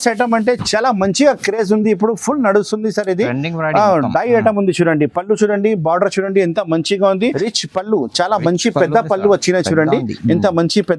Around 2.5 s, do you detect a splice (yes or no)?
no